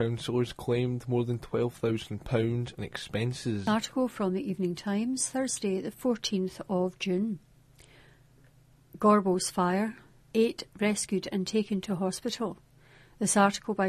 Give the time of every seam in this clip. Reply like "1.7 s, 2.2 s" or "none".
3.6 s